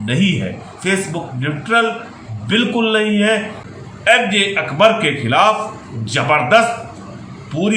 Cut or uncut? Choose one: cut